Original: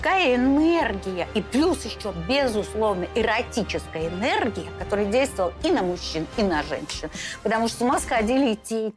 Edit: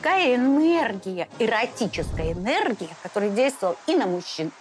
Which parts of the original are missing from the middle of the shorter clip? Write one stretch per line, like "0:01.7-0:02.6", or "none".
0:01.3-0:03.1